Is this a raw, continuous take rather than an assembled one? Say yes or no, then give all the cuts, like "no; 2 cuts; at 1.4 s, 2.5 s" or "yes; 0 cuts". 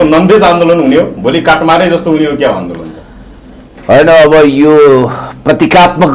yes; 0 cuts